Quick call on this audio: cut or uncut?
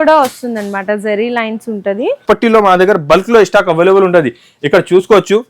cut